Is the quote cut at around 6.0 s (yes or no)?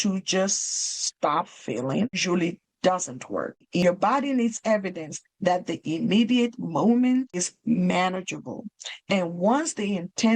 no